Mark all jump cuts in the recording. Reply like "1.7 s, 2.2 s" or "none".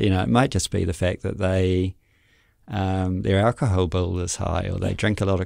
none